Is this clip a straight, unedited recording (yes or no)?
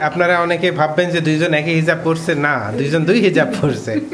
yes